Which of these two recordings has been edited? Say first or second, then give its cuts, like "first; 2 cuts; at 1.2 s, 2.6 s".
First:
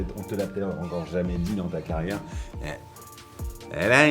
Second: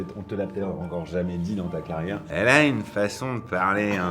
second; 1 cut; at 2.2 s